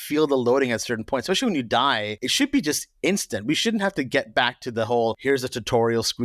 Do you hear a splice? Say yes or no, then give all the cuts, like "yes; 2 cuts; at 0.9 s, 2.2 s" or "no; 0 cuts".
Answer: yes; 2 cuts; at 2.2 s, 5.2 s